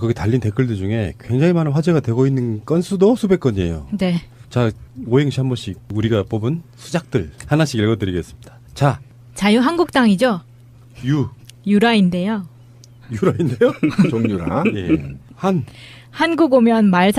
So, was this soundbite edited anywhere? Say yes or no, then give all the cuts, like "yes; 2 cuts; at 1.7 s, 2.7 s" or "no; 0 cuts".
no; 0 cuts